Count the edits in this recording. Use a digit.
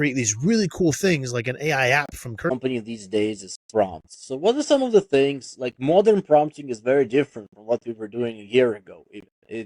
1